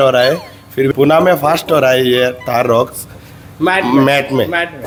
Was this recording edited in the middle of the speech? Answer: no; 0 cuts

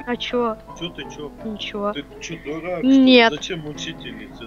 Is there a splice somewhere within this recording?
no; 0 cuts

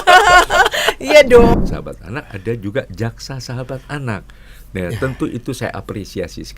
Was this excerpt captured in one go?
no; 1 cut; at 1.6 s

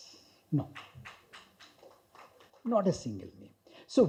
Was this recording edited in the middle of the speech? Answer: no; 0 cuts

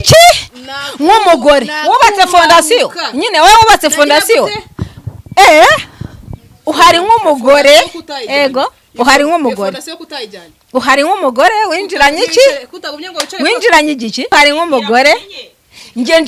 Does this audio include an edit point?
yes; 1 cut; at 14.3 s

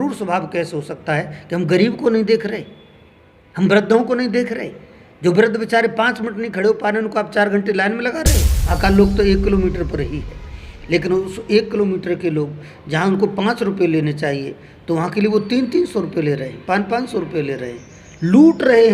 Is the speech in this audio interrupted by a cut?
yes; 1 cut; at 8.6 s

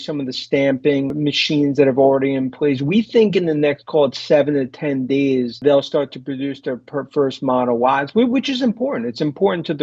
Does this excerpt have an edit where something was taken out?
yes; 2 cuts; at 1.1 s, 5.6 s

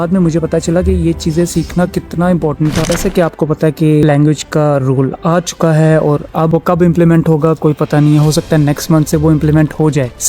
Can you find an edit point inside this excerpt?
yes; 1 cut; at 2.9 s

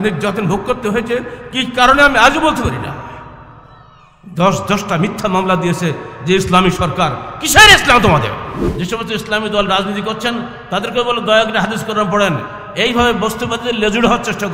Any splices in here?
yes; 1 cut; at 8.6 s

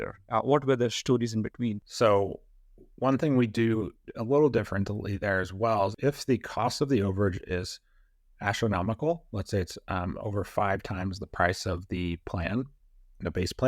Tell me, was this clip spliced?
yes; 2 cuts; at 1.8 s, 6.0 s

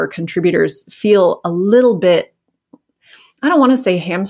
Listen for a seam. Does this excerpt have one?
no; 0 cuts

